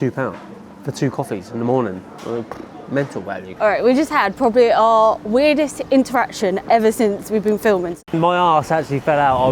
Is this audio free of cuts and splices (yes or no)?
no